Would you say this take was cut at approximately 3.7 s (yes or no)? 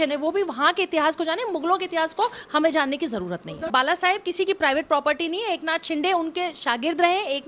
yes